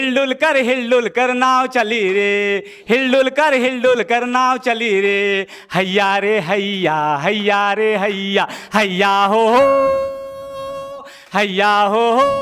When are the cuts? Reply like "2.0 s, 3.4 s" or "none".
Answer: none